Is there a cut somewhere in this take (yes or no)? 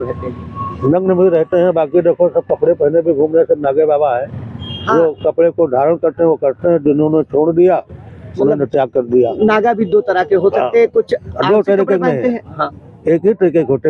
no